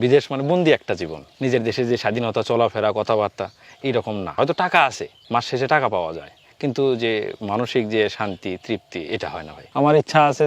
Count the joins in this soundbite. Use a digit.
3